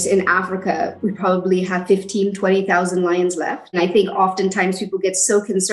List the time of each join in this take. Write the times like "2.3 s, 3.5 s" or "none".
1.0 s, 3.8 s